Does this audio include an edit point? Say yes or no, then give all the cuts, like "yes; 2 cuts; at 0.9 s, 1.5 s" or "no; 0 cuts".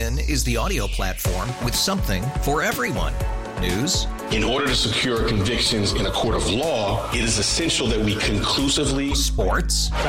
no; 0 cuts